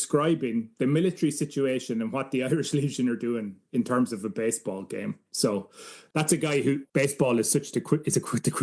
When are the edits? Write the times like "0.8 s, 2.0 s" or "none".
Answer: 5.9 s, 6.8 s